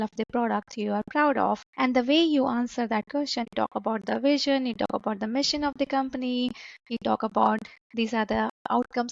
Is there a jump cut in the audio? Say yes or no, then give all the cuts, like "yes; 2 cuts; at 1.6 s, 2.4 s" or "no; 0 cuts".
yes; 2 cuts; at 1.7 s, 3.5 s